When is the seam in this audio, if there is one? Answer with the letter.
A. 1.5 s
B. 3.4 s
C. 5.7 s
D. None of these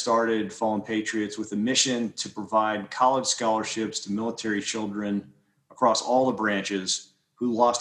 D